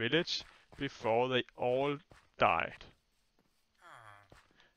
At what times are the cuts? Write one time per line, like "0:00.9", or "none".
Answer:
0:02.8